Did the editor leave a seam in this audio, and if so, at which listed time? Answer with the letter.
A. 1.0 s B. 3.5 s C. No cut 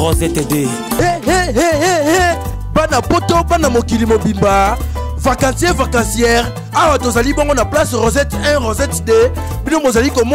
A